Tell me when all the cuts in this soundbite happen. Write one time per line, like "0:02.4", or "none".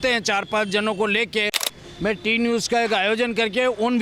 0:01.7